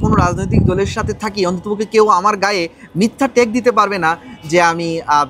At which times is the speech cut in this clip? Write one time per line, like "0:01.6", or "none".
none